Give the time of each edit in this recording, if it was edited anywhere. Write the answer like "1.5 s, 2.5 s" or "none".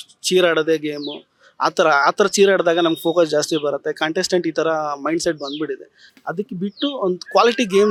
none